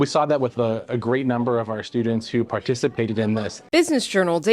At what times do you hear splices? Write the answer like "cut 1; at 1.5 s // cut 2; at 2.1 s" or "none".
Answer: cut 1; at 3.6 s